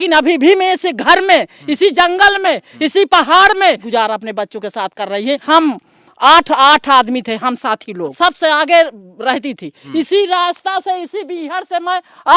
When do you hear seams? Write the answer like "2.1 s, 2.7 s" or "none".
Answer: 3.8 s, 5.4 s, 8.1 s, 9.8 s